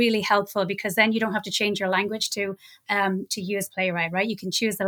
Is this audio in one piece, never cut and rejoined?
yes; 0 cuts

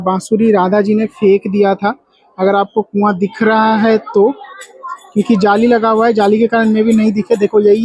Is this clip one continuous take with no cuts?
yes; 0 cuts

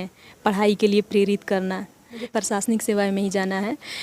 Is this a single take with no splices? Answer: no; 1 cut; at 2.3 s

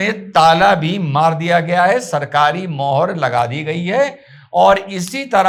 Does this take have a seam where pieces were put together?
no; 0 cuts

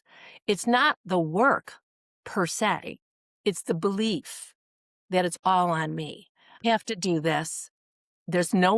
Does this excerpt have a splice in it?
yes; 1 cut; at 6.6 s

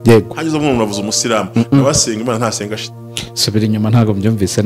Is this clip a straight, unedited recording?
no; 1 cut; at 2.9 s

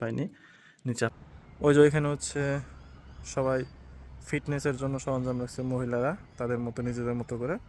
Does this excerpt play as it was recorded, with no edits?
no; 1 cut; at 1.3 s

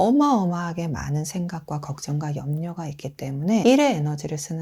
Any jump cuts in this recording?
yes; 1 cut; at 3.6 s

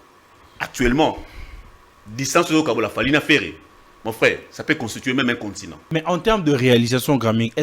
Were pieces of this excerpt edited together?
yes; 1 cut; at 5.9 s

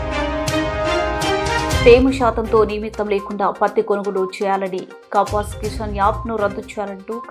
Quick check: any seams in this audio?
yes; 1 cut; at 1.8 s

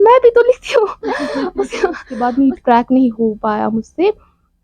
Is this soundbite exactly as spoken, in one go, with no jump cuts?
no; 1 cut; at 2.1 s

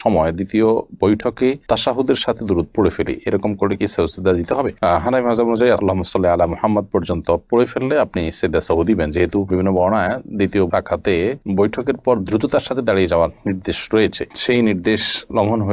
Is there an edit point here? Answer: no; 0 cuts

